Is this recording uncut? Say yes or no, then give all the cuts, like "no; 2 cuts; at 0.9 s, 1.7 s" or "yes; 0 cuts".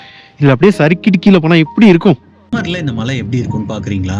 no; 1 cut; at 2.5 s